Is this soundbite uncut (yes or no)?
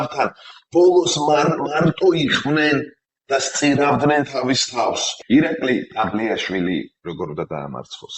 no